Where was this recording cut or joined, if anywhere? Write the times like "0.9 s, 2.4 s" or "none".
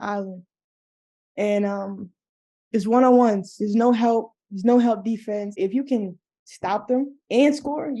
5.6 s